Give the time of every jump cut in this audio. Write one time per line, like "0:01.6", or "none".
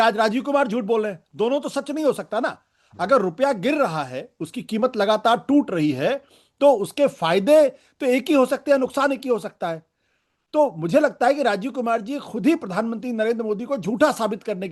none